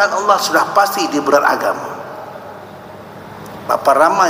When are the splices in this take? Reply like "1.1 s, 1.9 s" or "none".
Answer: 1.3 s